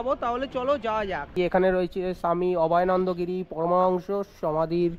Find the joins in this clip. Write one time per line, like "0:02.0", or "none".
0:01.3